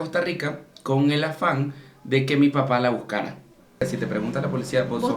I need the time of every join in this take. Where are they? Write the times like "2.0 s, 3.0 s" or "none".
3.8 s